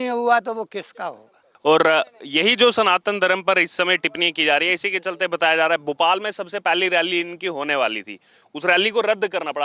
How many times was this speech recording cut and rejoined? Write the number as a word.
zero